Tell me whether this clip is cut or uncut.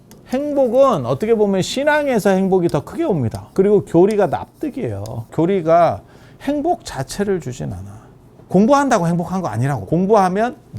cut